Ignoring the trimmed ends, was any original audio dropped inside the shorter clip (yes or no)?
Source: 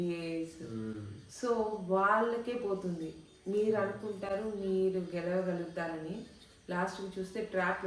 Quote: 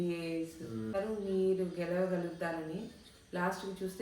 yes